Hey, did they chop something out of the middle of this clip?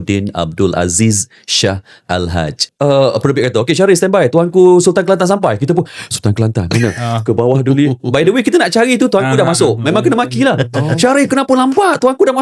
yes; 1 cut; at 2.7 s

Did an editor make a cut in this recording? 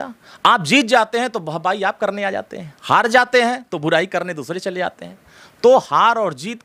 no; 0 cuts

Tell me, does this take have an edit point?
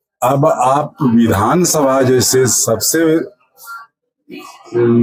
no; 0 cuts

